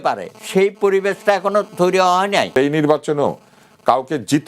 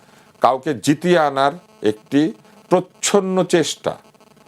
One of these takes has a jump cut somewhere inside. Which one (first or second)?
first